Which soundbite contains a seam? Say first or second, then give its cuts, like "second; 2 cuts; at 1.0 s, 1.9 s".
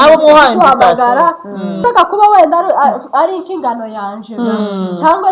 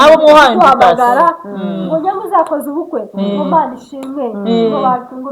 first; 1 cut; at 1.8 s